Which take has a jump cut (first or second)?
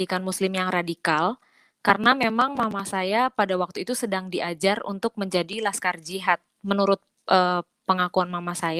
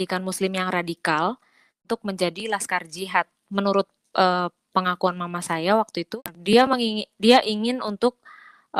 second